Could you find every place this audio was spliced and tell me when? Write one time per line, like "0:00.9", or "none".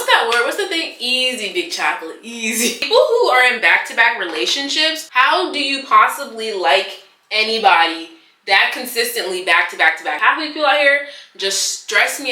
0:02.8
0:05.0
0:10.2